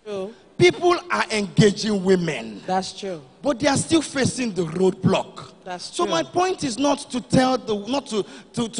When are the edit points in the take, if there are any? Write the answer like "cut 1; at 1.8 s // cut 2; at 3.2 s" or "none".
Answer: none